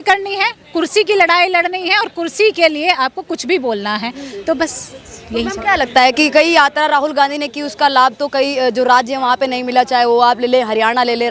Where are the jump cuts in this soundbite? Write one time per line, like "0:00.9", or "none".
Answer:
none